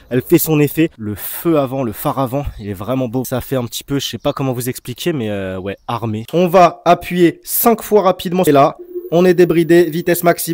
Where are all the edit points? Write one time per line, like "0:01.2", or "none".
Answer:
0:01.0
0:03.3
0:06.2
0:08.5